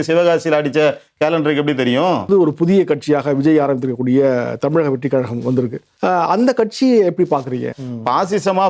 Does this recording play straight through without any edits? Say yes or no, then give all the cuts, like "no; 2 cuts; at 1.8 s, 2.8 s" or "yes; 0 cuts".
no; 3 cuts; at 2.3 s, 5.8 s, 7.7 s